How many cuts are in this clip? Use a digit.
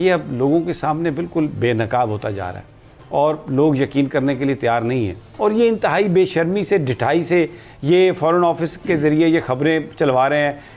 1